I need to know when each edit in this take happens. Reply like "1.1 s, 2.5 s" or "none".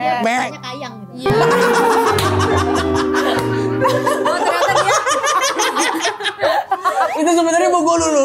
none